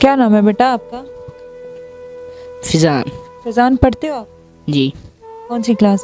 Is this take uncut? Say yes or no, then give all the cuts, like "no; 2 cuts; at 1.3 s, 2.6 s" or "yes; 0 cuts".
no; 2 cuts; at 1.0 s, 2.7 s